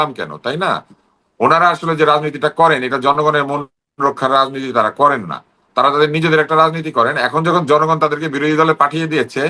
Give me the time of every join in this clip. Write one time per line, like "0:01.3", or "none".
0:01.1